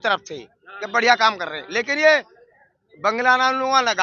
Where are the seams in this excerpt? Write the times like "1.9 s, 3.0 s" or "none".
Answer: none